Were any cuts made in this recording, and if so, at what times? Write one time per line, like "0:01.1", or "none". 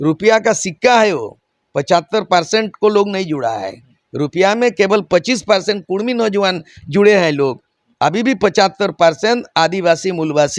none